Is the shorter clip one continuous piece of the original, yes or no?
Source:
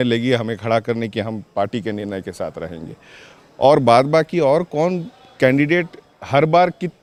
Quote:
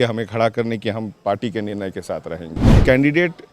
no